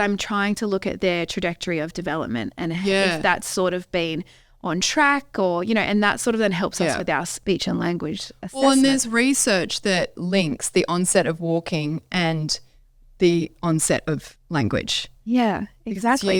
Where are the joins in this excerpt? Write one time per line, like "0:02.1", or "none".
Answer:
0:07.4
0:10.2